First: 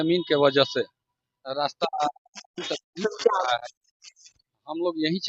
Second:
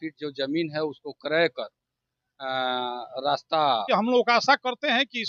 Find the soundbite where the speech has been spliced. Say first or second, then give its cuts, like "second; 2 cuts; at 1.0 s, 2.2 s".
second; 1 cut; at 4.1 s